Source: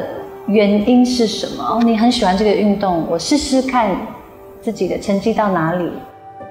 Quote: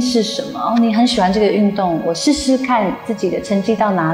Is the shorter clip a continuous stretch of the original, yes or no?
no